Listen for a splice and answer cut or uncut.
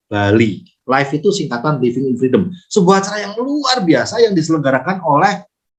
uncut